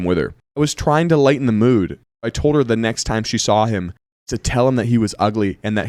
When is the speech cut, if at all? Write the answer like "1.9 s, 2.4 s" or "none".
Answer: none